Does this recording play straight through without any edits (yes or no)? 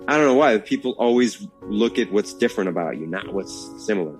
yes